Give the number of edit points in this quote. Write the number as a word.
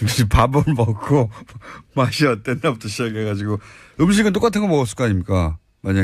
one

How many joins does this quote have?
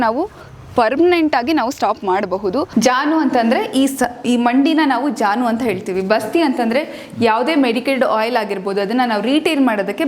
one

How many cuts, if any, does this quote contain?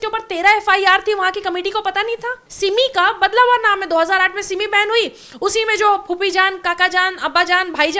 one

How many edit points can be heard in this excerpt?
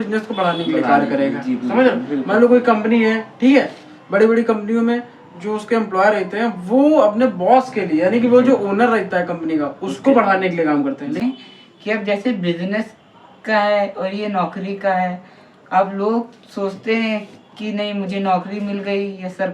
one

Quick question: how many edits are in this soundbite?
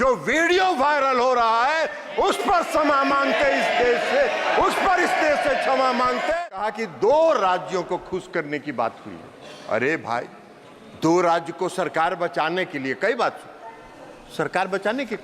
one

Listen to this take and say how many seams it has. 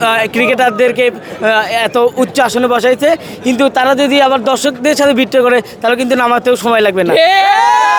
zero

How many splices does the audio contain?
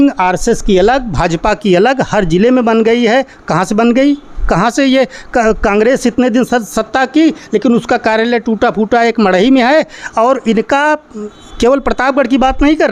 zero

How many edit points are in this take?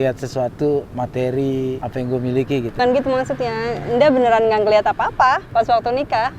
three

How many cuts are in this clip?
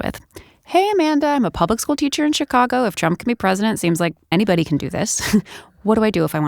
one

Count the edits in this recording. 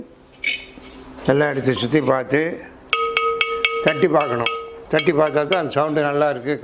one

